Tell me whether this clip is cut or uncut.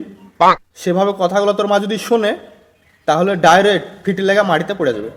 uncut